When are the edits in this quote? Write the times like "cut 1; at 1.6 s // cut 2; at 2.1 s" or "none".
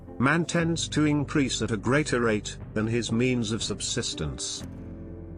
cut 1; at 4.3 s